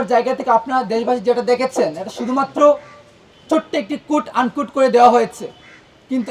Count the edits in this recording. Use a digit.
0